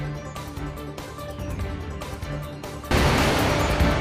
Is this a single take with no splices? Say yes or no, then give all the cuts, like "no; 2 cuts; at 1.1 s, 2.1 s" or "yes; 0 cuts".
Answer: yes; 0 cuts